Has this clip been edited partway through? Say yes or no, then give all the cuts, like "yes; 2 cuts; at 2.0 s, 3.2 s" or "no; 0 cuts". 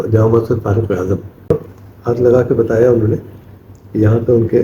yes; 1 cut; at 1.5 s